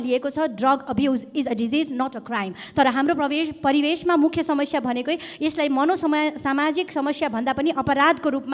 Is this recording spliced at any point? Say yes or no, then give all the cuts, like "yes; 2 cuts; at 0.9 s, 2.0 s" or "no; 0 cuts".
no; 0 cuts